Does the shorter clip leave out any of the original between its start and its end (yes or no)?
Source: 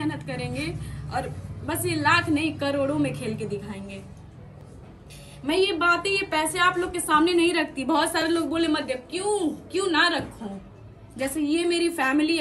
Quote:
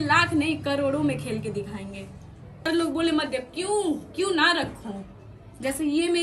yes